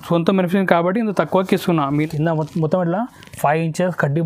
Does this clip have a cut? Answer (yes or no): yes